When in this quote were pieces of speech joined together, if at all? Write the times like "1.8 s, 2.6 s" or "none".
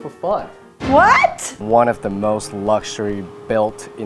1.6 s